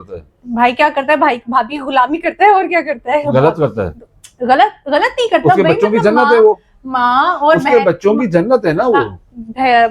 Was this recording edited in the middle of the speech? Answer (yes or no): no